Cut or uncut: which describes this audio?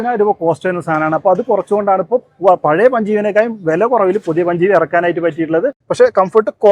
cut